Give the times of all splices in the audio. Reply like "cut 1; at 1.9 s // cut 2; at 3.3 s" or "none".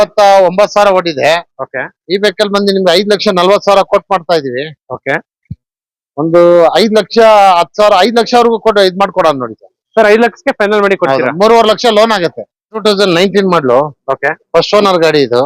cut 1; at 12.8 s